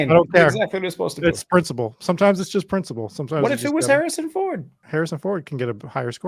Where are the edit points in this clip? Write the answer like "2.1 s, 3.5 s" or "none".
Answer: 4.8 s